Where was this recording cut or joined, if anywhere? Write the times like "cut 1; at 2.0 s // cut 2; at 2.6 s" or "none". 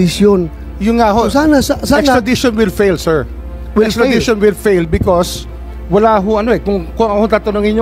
none